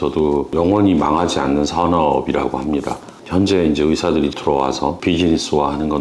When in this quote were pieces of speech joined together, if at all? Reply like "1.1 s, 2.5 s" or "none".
none